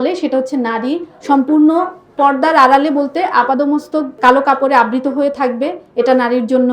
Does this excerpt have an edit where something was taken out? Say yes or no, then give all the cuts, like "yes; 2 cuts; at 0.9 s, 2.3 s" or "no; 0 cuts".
yes; 1 cut; at 1.1 s